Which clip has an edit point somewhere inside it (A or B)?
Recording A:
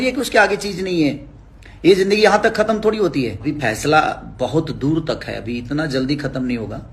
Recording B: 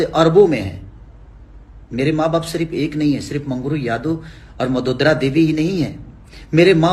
A